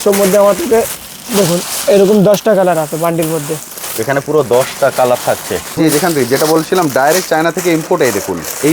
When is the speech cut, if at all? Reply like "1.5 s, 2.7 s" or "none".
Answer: 5.8 s